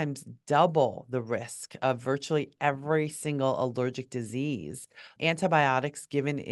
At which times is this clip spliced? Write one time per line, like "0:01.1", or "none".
0:05.1